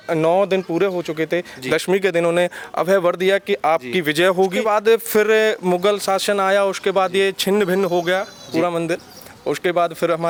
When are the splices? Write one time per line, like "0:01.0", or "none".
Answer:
none